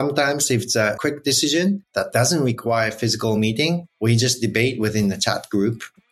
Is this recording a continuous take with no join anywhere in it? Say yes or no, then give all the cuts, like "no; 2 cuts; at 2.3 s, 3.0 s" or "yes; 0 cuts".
no; 3 cuts; at 1.0 s, 1.9 s, 3.9 s